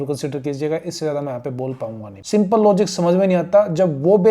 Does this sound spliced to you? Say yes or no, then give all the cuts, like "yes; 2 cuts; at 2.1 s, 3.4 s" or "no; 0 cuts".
yes; 1 cut; at 2.1 s